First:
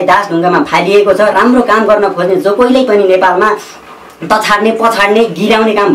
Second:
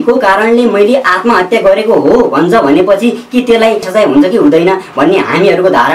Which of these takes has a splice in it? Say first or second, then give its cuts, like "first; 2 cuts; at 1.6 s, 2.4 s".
second; 1 cut; at 3.9 s